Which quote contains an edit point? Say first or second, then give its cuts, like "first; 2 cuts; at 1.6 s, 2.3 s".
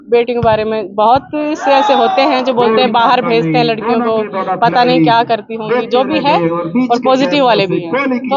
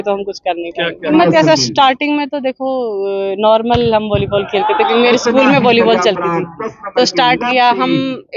second; 1 cut; at 1.1 s